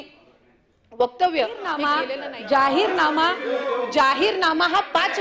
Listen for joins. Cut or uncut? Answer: cut